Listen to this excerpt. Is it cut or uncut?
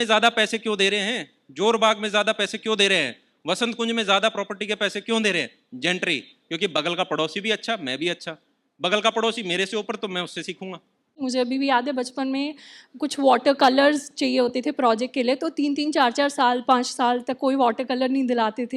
cut